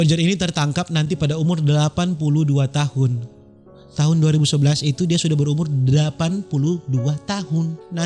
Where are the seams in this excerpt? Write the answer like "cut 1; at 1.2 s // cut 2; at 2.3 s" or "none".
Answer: none